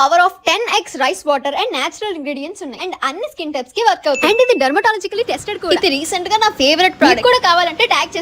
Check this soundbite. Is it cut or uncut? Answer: cut